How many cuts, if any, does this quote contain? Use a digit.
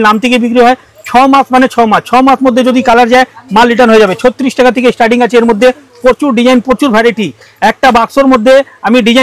0